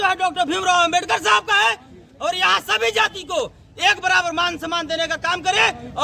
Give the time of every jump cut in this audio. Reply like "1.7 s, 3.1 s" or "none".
none